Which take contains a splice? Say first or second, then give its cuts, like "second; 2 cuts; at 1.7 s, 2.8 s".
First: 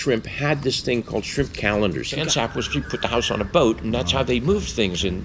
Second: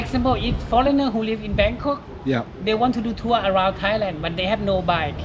first; 1 cut; at 2.1 s